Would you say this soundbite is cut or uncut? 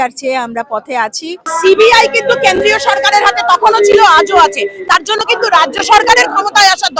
cut